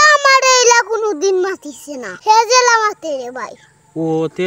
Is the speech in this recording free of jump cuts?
yes; 0 cuts

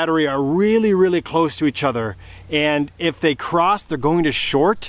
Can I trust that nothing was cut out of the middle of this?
yes; 0 cuts

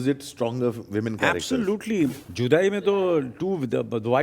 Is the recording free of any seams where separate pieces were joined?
no; 1 cut; at 2.1 s

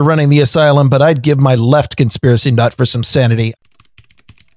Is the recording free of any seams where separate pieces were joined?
no; 1 cut; at 3.5 s

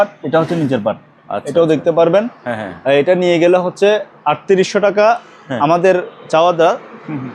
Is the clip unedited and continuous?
yes; 0 cuts

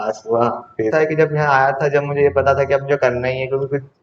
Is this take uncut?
no; 1 cut; at 0.9 s

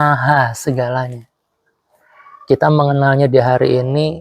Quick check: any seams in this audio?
no; 0 cuts

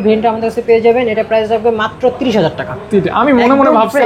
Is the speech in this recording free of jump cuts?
yes; 0 cuts

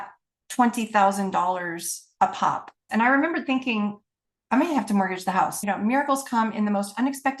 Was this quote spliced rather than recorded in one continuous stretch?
yes; 2 cuts; at 2.8 s, 5.6 s

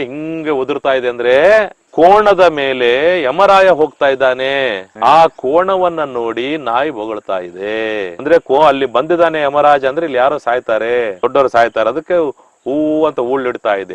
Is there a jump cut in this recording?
no; 0 cuts

